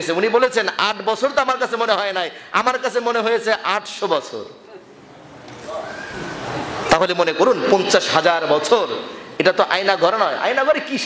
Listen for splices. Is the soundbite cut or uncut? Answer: uncut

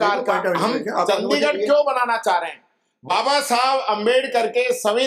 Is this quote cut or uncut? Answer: uncut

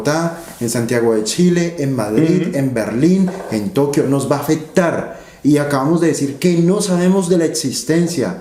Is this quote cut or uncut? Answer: uncut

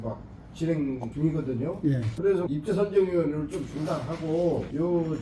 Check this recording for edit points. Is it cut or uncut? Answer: cut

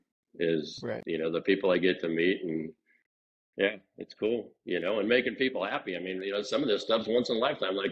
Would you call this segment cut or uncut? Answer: uncut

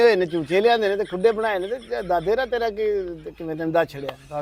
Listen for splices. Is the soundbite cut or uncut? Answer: uncut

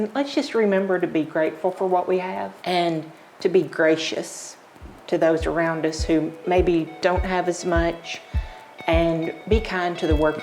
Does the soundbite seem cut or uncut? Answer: cut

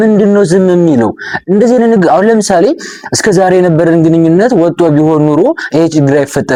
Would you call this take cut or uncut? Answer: uncut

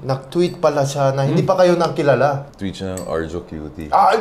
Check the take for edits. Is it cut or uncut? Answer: cut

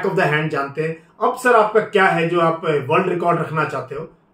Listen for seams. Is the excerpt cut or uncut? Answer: uncut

